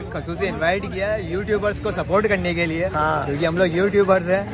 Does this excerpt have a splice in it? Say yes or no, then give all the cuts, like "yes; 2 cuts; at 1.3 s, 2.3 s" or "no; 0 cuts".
no; 0 cuts